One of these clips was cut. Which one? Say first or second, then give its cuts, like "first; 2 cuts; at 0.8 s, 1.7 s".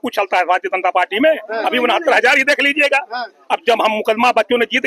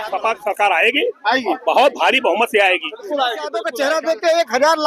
second; 1 cut; at 3.6 s